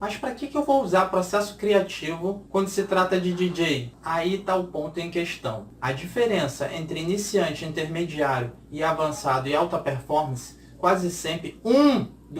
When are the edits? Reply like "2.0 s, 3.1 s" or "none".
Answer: 2.4 s, 3.9 s, 5.7 s